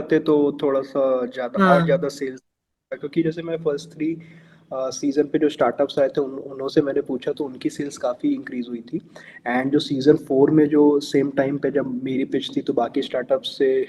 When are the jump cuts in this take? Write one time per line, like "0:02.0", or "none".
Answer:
none